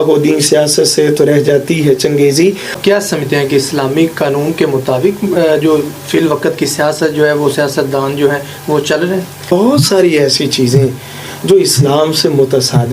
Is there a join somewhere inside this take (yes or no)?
yes